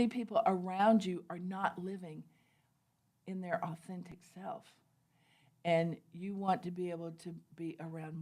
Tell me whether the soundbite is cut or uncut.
uncut